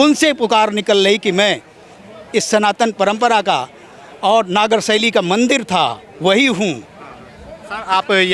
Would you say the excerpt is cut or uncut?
uncut